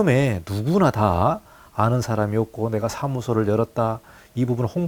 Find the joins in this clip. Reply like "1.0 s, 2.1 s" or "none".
none